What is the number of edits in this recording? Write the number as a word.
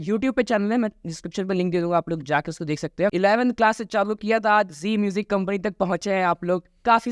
one